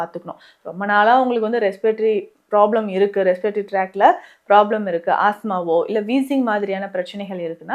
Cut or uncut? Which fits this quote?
uncut